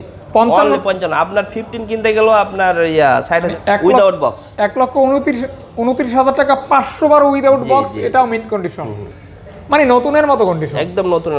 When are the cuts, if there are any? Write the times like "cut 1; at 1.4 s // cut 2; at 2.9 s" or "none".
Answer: cut 1; at 3.6 s